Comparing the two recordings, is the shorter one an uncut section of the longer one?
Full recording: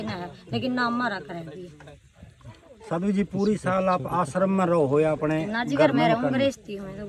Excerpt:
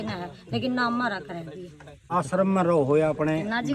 no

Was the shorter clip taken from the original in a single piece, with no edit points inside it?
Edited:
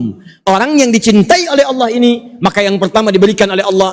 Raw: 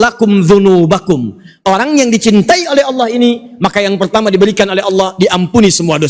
yes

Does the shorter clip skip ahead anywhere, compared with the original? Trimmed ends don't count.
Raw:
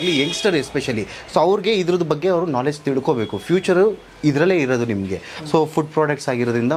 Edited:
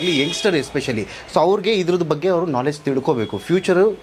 no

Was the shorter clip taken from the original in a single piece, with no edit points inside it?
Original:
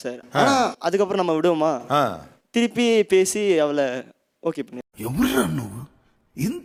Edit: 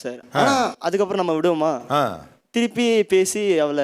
yes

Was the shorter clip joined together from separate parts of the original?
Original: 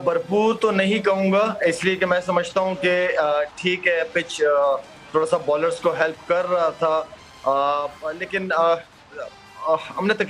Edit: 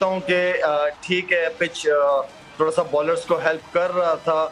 no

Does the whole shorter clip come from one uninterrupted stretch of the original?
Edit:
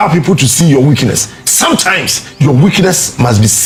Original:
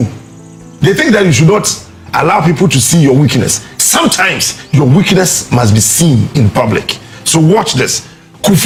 yes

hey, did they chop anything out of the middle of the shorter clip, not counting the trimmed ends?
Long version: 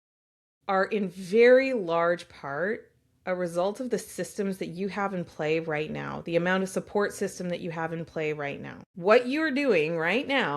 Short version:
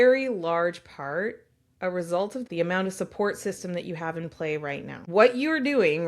yes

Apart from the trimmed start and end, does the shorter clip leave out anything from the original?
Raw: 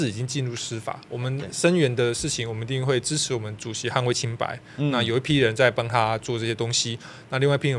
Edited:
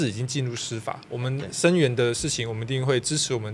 no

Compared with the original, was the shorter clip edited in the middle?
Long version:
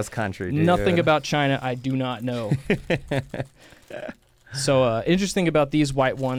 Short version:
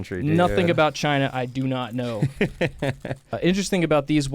yes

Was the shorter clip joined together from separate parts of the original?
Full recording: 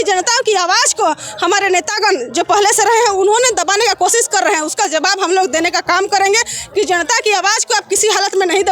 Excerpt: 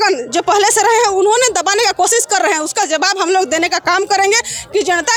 no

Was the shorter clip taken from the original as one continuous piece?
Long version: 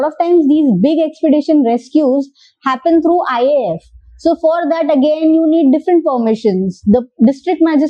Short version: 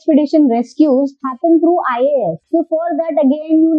no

